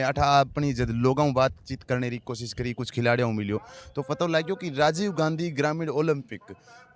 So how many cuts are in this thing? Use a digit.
0